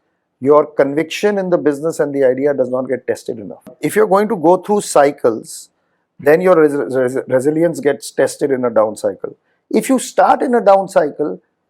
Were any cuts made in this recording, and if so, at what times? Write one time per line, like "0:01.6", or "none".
0:03.8